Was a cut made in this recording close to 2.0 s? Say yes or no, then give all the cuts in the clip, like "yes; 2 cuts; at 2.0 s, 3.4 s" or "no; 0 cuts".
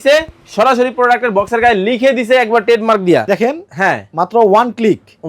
no; 1 cut; at 3.3 s